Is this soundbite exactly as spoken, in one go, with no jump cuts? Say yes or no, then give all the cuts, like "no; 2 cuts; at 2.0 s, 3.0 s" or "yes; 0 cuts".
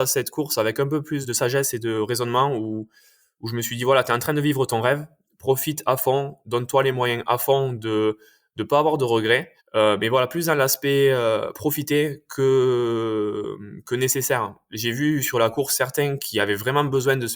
no; 1 cut; at 1.2 s